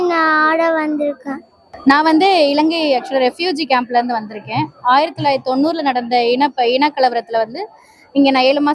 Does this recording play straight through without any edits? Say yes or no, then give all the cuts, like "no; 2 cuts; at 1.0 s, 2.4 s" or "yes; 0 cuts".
no; 1 cut; at 1.7 s